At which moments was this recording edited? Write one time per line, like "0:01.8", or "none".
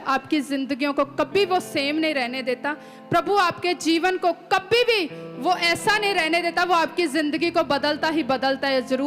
none